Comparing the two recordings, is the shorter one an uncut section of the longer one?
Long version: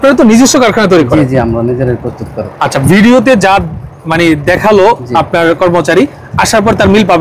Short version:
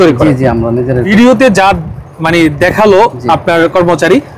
no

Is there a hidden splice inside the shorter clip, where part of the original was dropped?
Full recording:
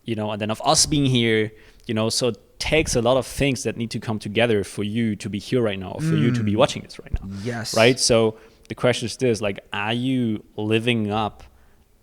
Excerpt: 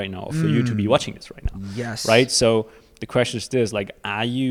no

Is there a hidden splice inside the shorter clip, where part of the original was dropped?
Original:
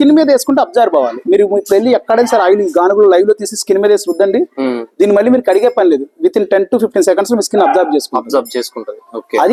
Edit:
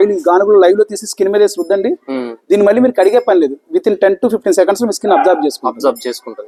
no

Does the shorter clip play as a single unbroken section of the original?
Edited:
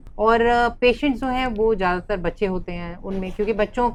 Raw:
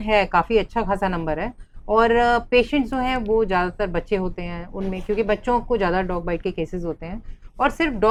yes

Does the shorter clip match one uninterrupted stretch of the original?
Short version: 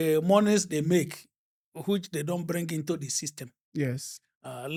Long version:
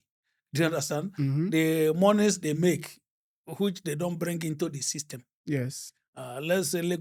yes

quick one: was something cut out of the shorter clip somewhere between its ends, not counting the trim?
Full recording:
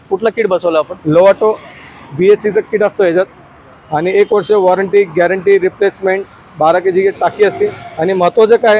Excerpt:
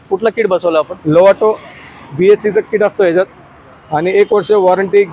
no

